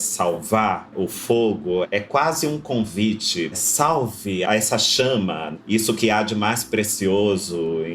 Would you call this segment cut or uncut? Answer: cut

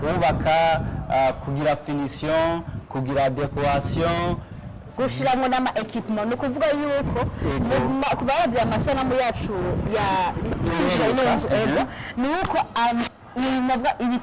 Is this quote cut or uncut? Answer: uncut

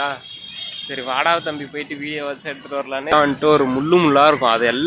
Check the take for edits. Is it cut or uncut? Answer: cut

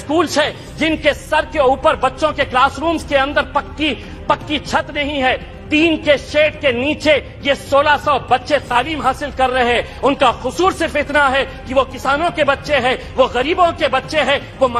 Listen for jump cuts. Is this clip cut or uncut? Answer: uncut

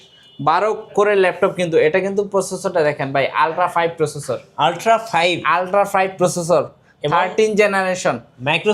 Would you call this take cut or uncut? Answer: uncut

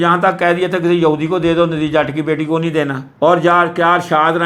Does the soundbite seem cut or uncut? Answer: uncut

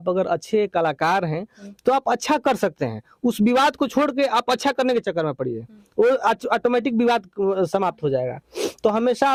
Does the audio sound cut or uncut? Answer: uncut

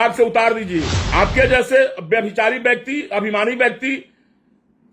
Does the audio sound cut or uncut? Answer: cut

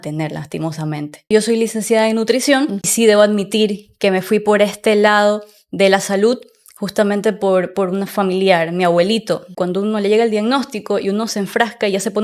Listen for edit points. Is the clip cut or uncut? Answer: cut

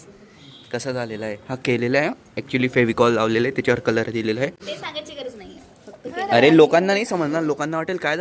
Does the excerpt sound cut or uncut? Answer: uncut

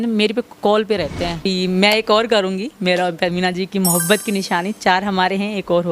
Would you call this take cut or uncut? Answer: cut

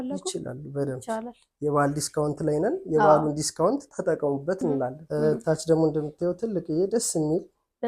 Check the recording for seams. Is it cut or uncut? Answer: cut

